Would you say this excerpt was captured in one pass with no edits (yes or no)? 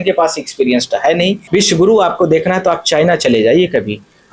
no